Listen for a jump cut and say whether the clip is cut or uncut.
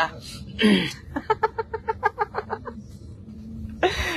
uncut